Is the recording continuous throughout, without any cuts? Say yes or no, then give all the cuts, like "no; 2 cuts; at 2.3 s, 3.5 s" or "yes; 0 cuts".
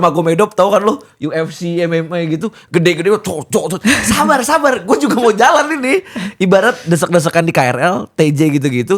yes; 0 cuts